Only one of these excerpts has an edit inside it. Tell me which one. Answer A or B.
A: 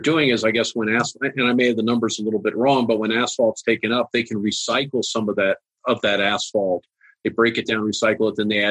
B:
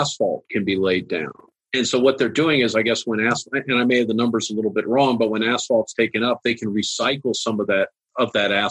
B